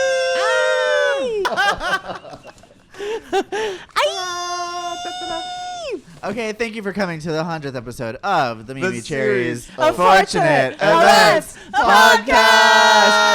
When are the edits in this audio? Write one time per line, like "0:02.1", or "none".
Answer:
0:01.5